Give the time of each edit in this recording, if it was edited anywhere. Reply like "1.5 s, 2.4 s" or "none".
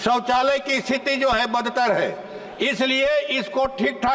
none

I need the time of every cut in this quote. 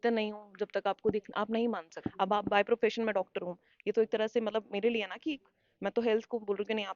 2.0 s

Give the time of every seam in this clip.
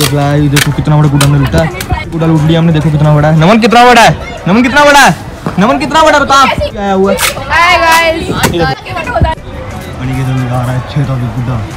none

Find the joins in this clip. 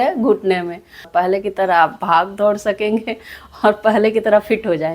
1.1 s

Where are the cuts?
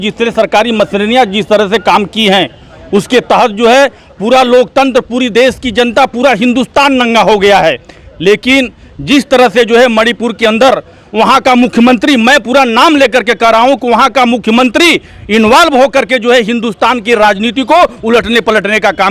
none

